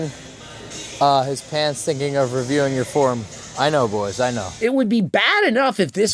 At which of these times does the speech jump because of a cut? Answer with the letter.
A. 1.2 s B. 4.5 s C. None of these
B